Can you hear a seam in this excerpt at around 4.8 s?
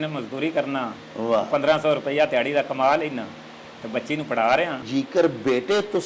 yes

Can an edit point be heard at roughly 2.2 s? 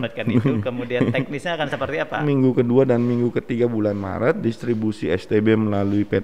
yes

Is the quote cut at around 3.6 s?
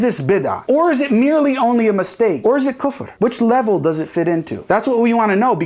no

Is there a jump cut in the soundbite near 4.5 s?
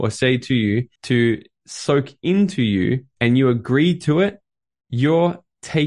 no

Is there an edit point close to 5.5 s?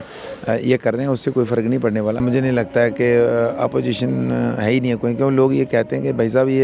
no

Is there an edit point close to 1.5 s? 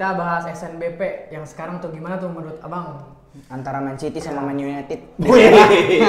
no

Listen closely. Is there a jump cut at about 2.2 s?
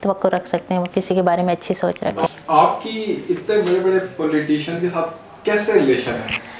no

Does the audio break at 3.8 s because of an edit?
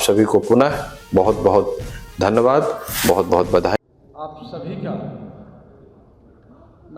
yes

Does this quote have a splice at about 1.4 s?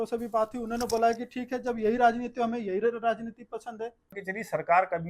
no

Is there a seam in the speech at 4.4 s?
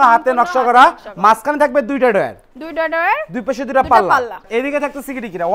yes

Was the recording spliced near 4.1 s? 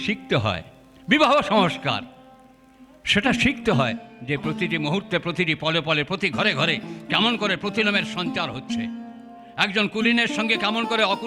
yes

